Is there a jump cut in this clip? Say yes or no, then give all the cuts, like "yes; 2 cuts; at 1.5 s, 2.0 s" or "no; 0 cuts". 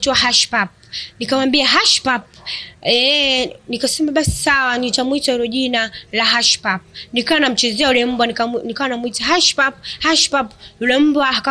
no; 0 cuts